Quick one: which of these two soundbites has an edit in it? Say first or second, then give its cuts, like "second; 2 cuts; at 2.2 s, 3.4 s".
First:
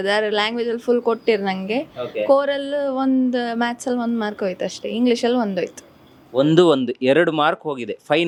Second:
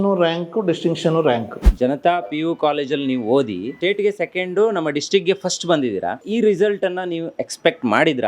second; 3 cuts; at 1.6 s, 3.8 s, 6.2 s